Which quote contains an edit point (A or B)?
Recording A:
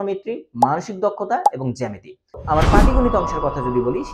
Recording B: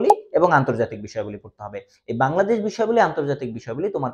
A